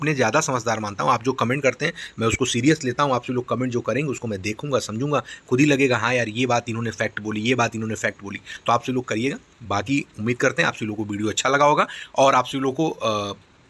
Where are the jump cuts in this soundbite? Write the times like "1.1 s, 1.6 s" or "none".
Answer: none